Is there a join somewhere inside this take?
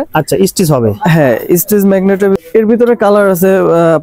yes; 1 cut; at 2.4 s

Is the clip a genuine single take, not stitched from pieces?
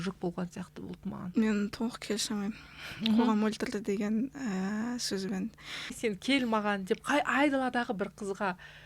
no; 2 cuts; at 1.2 s, 6.0 s

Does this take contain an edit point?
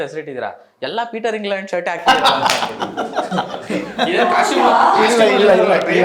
no; 0 cuts

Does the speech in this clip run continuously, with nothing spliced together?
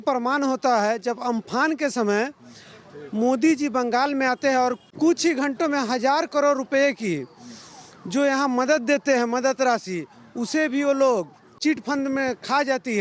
no; 1 cut; at 11.5 s

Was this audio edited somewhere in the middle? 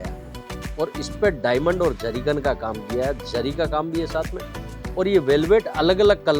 no; 0 cuts

